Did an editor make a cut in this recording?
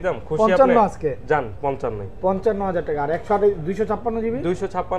no; 0 cuts

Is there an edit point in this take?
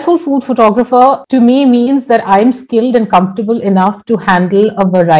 yes; 1 cut; at 1.2 s

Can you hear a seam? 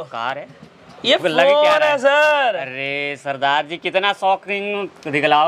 no; 0 cuts

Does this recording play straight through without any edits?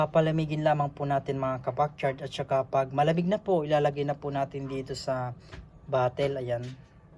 yes; 0 cuts

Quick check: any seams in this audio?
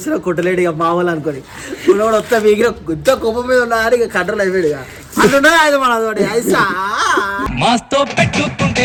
no; 0 cuts

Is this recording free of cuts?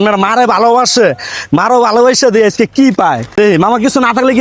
no; 1 cut; at 3.4 s

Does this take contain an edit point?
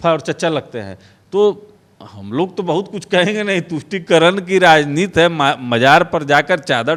no; 0 cuts

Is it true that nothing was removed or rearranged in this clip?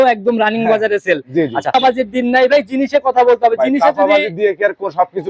no; 1 cut; at 1.7 s

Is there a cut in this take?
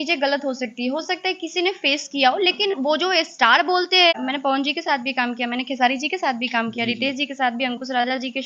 yes; 1 cut; at 4.2 s

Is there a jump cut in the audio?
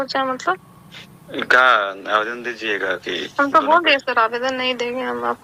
no; 0 cuts

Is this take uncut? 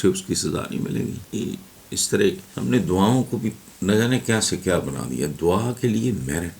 no; 2 cuts; at 1.2 s, 2.5 s

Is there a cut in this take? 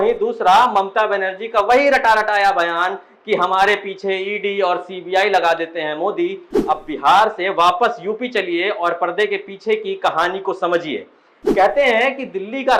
yes; 1 cut; at 6.7 s

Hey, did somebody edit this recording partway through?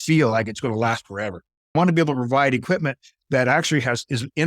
yes; 1 cut; at 1.7 s

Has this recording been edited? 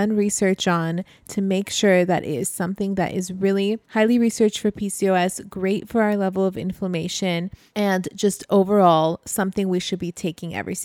yes; 2 cuts; at 3.8 s, 7.6 s

